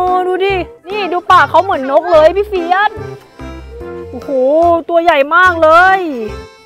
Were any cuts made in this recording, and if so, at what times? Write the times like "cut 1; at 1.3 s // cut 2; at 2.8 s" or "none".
none